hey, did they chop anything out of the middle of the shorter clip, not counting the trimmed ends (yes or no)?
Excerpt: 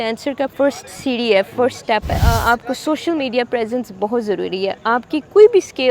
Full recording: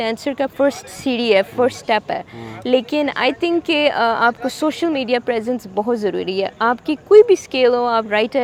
yes